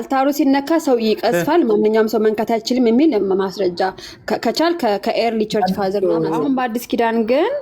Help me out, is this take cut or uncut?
cut